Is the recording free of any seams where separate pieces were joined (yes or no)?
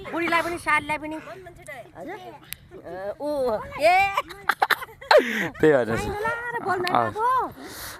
yes